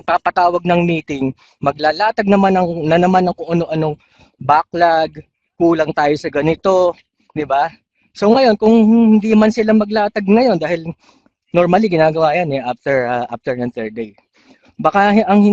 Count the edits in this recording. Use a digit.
0